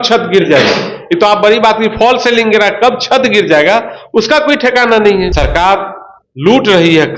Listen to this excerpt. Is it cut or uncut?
cut